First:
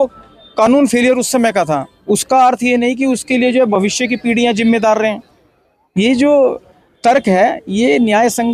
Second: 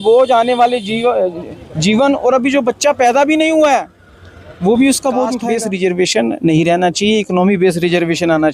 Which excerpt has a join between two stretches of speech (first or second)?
second